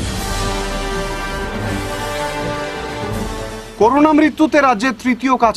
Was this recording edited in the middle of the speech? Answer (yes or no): no